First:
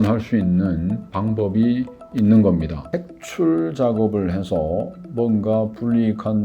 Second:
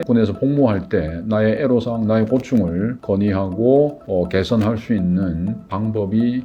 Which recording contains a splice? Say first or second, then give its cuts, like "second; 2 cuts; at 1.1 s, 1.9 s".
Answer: first; 1 cut; at 2.8 s